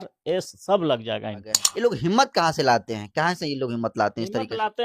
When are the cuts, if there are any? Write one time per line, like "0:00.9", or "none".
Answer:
0:01.6